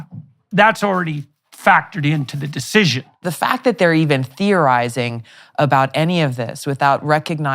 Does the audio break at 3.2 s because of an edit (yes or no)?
yes